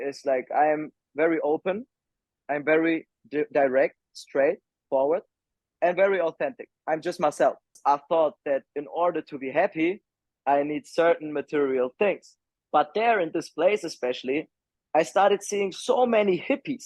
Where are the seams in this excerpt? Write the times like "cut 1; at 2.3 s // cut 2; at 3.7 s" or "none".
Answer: cut 1; at 7.8 s